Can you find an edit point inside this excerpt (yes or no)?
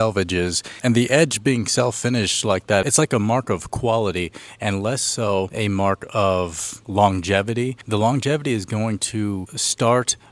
no